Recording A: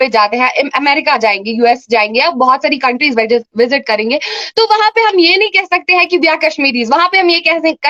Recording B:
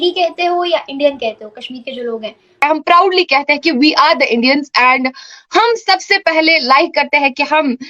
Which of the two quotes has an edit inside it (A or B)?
B